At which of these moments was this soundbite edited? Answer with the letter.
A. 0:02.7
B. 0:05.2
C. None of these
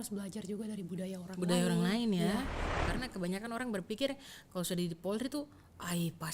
A